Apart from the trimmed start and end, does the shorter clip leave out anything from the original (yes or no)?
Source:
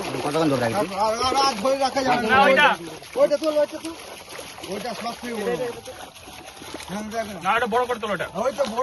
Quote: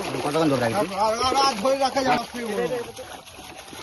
yes